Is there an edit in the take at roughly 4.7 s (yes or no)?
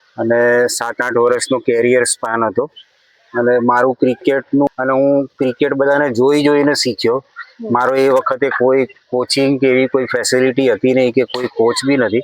yes